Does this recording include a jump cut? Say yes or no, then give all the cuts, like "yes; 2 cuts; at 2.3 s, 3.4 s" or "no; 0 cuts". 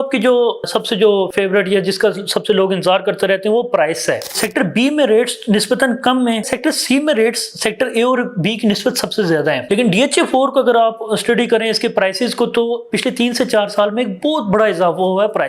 yes; 3 cuts; at 4.4 s, 6.4 s, 9.6 s